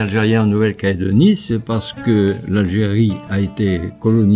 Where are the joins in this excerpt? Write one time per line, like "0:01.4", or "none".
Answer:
none